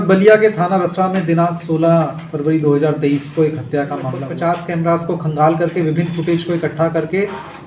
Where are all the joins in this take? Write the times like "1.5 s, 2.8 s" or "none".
4.2 s